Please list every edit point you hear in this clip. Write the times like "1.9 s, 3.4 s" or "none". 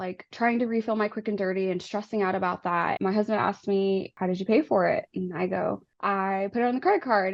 3.0 s, 4.1 s, 5.9 s